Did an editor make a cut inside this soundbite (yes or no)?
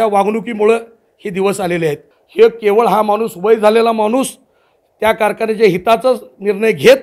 yes